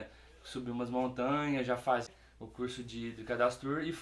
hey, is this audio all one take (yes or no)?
no